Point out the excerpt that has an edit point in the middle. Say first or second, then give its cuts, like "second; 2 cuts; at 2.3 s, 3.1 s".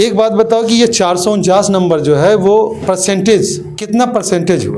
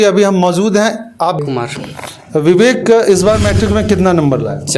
second; 1 cut; at 1.4 s